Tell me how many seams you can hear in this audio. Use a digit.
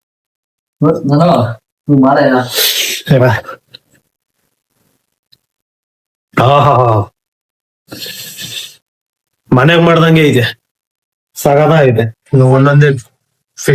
1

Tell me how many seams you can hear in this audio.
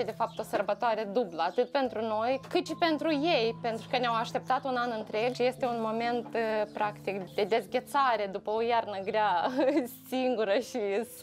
3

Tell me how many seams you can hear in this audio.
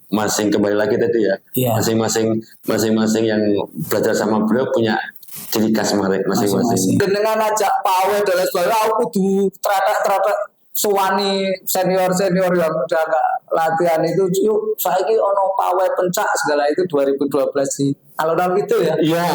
1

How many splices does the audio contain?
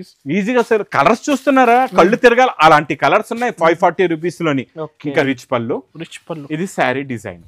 1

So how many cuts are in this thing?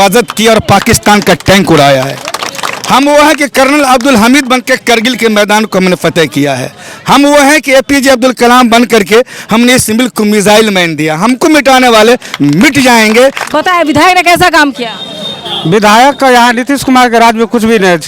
1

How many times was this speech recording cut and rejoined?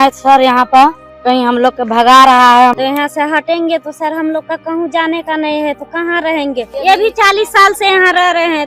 3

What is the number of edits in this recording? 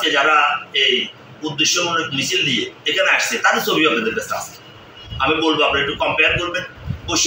0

